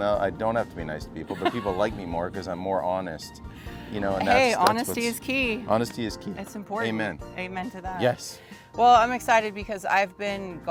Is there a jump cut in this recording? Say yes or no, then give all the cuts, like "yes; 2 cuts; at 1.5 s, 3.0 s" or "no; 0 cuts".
no; 0 cuts